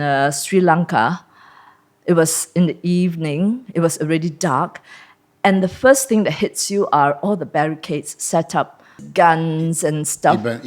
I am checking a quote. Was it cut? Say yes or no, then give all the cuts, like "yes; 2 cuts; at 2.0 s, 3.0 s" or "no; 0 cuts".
yes; 1 cut; at 9.0 s